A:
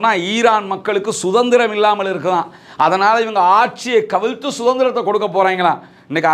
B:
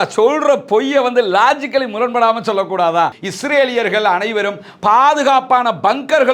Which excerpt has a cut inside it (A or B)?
B